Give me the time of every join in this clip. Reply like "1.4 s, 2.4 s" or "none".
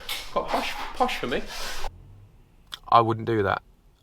1.8 s